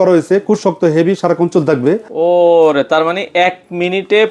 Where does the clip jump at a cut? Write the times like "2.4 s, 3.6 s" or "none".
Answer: 2.1 s